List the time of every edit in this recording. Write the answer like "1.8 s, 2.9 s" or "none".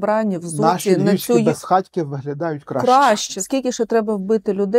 3.3 s